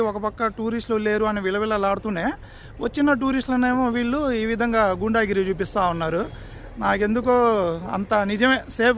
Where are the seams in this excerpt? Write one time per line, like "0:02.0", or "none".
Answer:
none